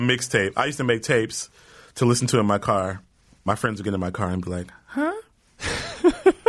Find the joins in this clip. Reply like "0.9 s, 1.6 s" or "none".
3.5 s